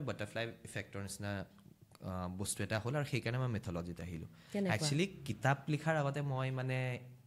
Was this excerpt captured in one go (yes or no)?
yes